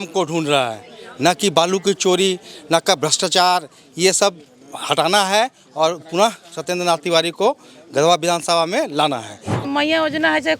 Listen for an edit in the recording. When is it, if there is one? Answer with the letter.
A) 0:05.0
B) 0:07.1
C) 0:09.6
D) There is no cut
C